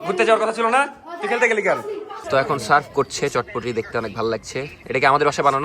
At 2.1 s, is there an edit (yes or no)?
yes